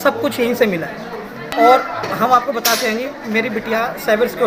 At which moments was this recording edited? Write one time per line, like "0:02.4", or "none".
none